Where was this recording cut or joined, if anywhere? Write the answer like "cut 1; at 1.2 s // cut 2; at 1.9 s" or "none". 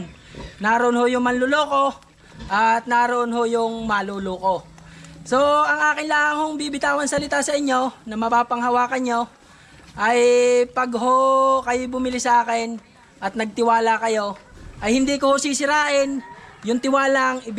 none